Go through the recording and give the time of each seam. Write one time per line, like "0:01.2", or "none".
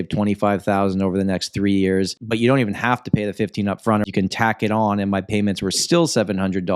0:02.2
0:04.0